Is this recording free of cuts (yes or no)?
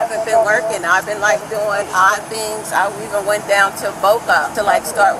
yes